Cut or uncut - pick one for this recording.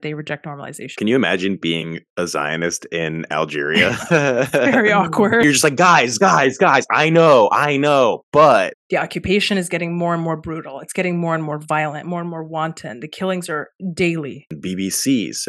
cut